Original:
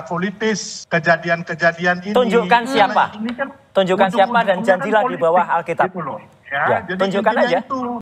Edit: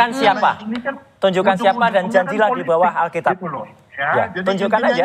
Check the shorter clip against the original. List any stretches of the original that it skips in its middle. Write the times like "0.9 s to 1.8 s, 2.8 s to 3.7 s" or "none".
none